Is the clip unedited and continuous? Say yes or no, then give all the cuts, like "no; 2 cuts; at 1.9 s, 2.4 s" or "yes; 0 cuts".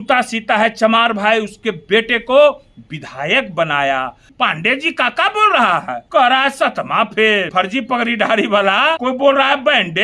no; 4 cuts; at 4.2 s, 6.0 s, 7.5 s, 9.0 s